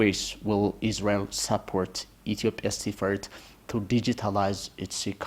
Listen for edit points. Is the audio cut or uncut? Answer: uncut